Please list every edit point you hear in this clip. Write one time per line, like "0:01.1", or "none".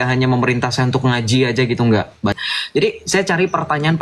0:02.4